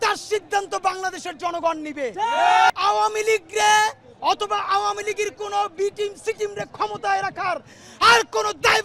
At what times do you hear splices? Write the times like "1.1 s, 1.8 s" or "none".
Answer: 2.7 s